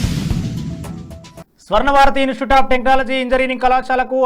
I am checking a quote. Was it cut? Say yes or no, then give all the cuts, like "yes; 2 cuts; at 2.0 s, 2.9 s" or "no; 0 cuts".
yes; 1 cut; at 1.4 s